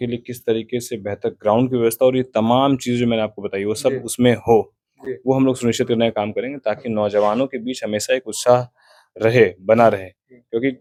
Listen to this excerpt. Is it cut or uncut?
uncut